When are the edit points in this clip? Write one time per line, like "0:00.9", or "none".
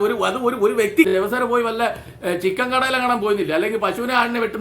0:01.1